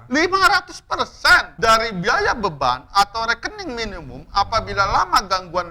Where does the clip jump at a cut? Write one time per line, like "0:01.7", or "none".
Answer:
0:01.5

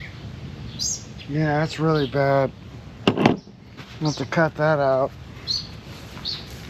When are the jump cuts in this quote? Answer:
none

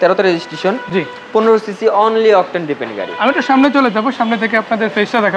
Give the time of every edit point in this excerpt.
none

